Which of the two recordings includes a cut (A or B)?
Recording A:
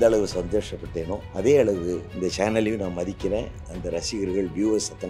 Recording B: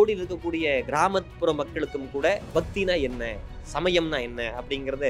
A